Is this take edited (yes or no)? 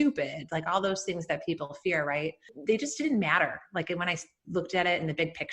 yes